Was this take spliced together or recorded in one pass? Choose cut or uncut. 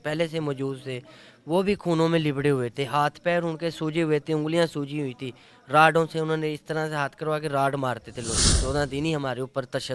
cut